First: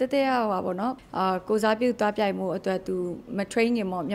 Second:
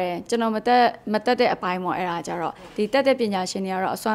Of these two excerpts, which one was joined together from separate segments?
first; 1 cut; at 1.0 s

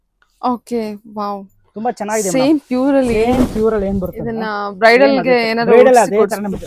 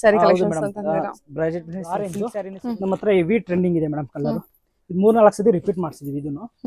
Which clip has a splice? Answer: second; 1 cut; at 2.2 s

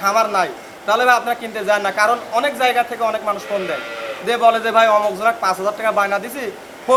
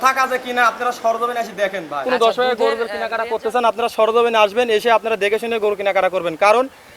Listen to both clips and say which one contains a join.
second; 1 cut; at 2.1 s

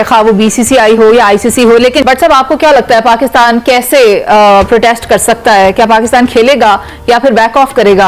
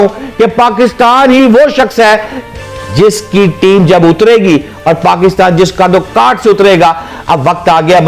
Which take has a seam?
first; 1 cut; at 2.0 s

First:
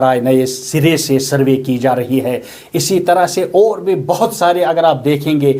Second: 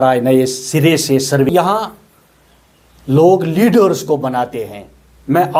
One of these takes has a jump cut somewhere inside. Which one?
second; 1 cut; at 1.5 s

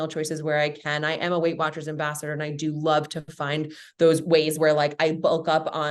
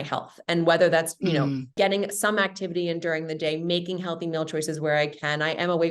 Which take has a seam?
second; 1 cut; at 1.7 s

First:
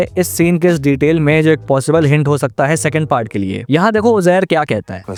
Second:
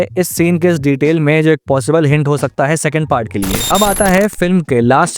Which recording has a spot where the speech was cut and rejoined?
second; 1 cut; at 3.6 s

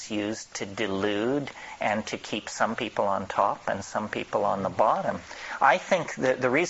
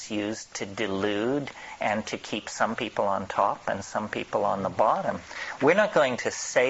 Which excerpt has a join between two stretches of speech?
second; 1 cut; at 5.4 s

